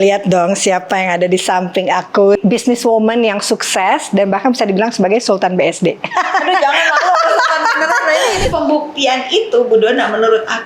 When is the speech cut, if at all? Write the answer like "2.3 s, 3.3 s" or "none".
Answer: 2.4 s, 8.5 s